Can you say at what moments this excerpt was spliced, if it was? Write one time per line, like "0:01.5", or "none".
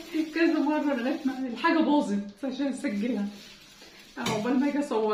none